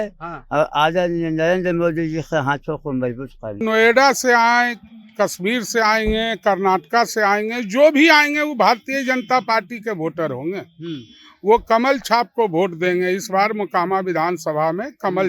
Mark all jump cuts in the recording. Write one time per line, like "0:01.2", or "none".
0:03.6